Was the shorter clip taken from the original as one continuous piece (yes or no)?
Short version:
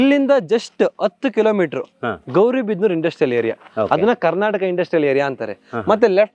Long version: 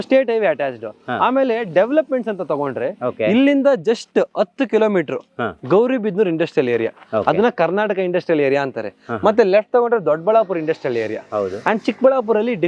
yes